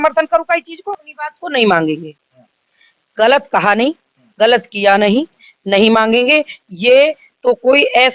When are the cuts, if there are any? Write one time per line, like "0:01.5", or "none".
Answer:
0:01.1